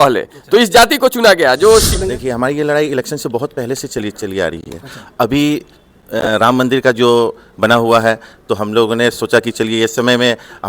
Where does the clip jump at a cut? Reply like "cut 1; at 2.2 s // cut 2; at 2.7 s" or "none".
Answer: cut 1; at 2.0 s